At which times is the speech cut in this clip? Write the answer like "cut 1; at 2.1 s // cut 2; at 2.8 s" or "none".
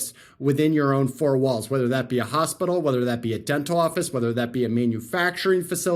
none